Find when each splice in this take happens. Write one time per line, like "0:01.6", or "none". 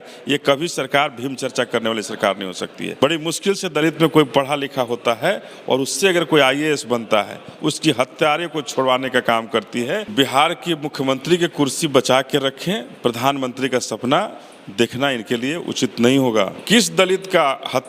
0:02.9
0:10.1
0:16.6